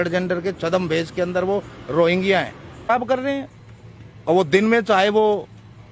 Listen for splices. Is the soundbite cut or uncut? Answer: cut